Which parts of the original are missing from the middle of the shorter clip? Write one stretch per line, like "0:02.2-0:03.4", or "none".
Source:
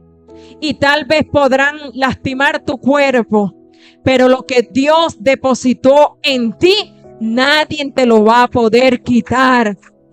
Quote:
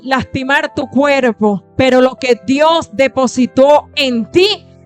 0:03.6-0:03.9